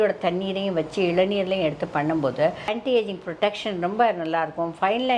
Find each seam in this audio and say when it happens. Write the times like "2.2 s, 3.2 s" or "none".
none